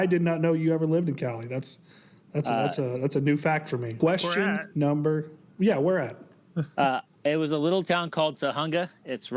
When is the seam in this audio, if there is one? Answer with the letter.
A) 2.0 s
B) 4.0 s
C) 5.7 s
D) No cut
B